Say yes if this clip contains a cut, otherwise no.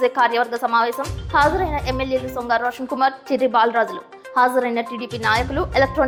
no